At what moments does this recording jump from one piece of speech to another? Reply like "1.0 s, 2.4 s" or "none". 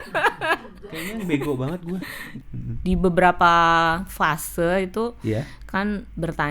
2.3 s